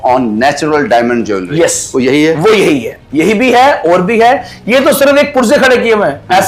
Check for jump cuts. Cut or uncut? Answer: uncut